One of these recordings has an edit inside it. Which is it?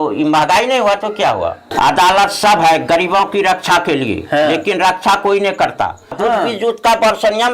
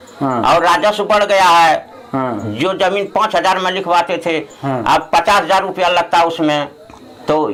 first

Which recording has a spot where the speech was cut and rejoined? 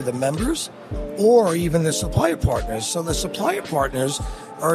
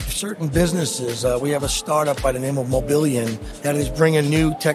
second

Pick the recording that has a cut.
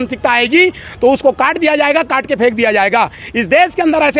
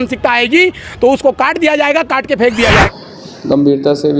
second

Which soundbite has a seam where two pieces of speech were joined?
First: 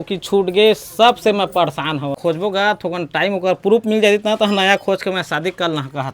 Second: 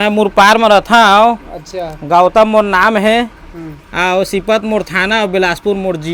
first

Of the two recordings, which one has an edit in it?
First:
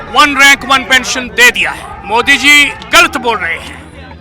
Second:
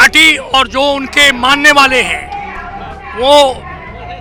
first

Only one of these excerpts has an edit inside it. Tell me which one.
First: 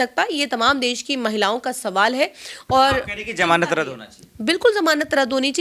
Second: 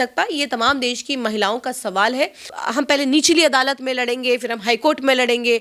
second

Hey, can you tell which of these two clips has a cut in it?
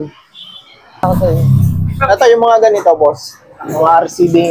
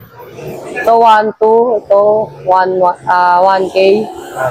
first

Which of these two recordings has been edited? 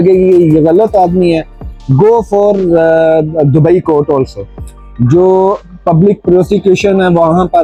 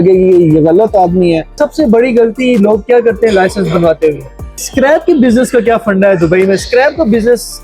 second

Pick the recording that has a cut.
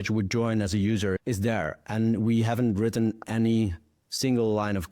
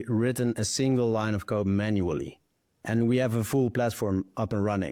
first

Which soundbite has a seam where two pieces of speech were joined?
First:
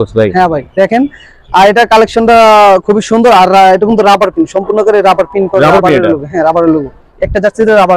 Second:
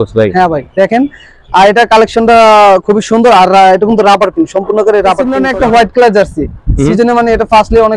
second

